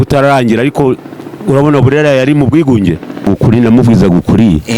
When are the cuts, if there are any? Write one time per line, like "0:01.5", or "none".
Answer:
0:03.2